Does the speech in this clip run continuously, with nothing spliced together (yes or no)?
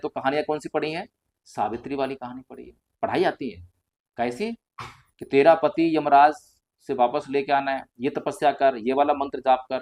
yes